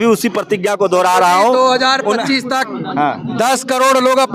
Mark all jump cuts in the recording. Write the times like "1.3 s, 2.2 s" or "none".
none